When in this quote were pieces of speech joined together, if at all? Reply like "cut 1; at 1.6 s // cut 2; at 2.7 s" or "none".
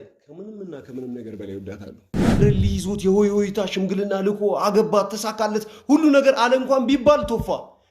cut 1; at 2.4 s